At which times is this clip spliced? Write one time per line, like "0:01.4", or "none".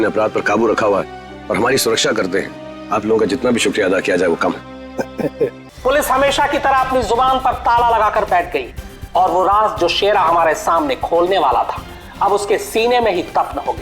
0:05.6